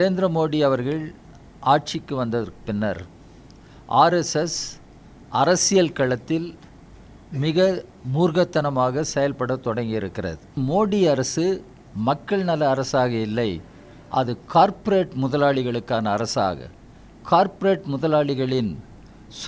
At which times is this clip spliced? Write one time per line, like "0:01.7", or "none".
0:10.6